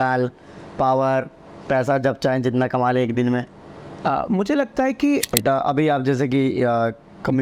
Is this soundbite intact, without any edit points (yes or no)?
no